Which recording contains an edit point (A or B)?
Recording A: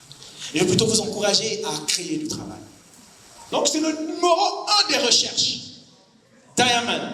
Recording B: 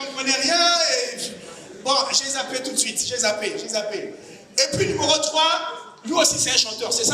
A